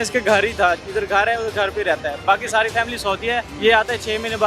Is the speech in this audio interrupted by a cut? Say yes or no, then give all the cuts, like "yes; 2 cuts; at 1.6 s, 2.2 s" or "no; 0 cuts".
yes; 1 cut; at 3.5 s